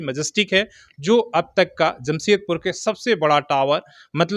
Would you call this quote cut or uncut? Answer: uncut